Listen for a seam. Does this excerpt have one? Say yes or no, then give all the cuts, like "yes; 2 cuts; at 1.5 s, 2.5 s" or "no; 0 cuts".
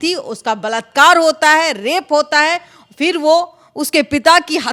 no; 0 cuts